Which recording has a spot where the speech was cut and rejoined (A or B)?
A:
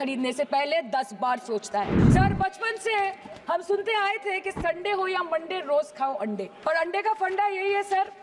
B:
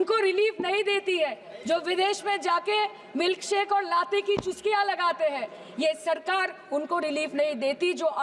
A